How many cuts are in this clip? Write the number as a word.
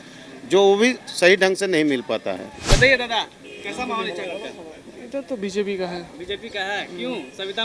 one